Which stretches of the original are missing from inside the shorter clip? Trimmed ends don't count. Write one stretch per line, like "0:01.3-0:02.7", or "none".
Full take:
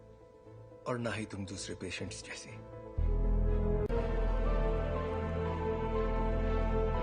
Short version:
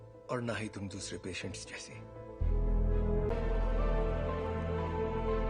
0:03.9-0:04.0